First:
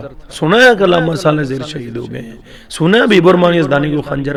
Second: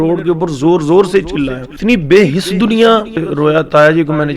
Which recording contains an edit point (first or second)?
second